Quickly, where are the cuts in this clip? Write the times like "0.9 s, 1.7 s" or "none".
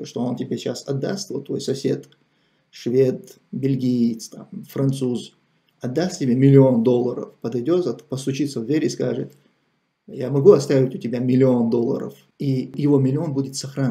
12.8 s